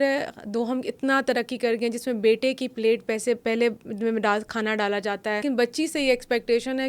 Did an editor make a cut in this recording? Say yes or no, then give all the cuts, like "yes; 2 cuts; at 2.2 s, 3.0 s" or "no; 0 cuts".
yes; 1 cut; at 5.4 s